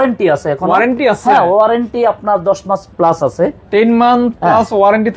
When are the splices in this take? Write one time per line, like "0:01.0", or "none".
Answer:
none